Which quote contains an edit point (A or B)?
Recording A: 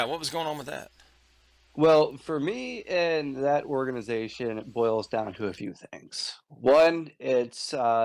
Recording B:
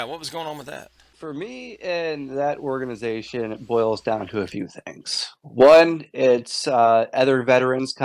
B